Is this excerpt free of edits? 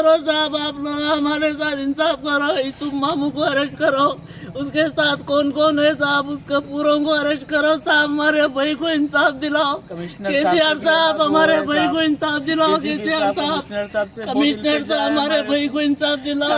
yes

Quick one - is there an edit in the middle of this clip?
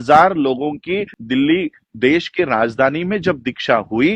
yes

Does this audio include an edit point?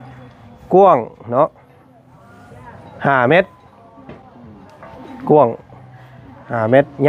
no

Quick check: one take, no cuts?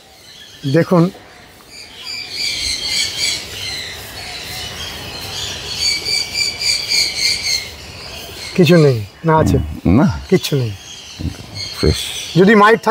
yes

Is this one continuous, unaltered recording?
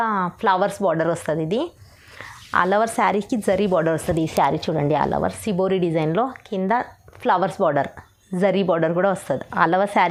yes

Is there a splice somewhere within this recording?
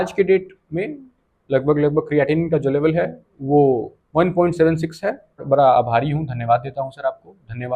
yes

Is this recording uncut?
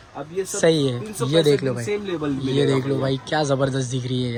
yes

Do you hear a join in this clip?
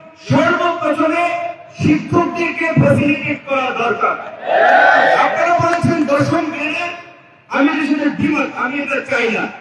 no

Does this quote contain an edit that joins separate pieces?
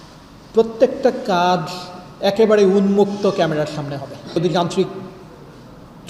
yes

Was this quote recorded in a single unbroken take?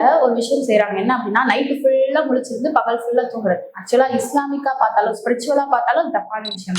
yes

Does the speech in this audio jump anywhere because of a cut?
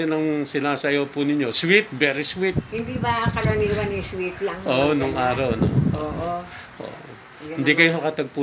no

